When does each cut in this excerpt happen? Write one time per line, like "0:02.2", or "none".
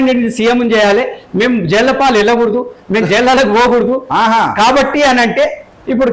none

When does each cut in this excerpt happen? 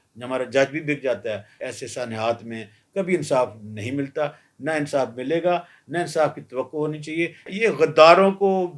0:01.5
0:07.5

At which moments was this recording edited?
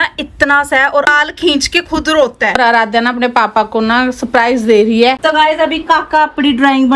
0:01.1
0:02.6
0:05.2

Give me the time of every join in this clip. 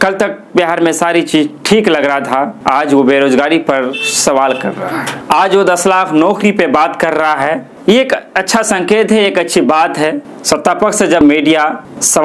0:10.3
0:11.2

